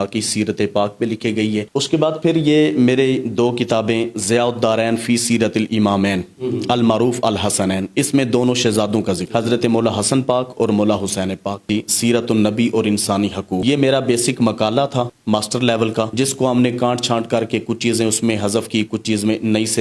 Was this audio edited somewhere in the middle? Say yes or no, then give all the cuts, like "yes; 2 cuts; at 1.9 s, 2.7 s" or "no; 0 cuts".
yes; 2 cuts; at 1.6 s, 11.6 s